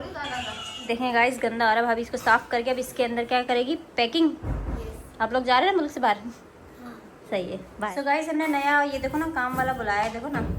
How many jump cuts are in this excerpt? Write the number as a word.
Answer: two